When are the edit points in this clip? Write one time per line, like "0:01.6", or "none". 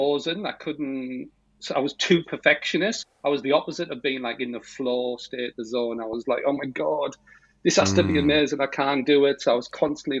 none